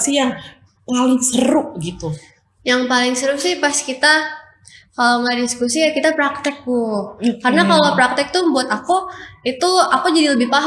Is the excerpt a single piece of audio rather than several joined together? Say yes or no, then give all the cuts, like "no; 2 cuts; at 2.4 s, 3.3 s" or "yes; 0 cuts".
yes; 0 cuts